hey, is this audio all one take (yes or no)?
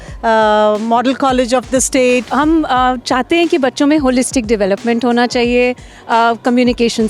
no